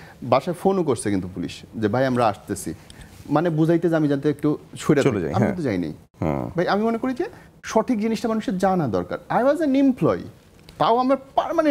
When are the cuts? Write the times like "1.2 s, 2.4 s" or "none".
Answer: none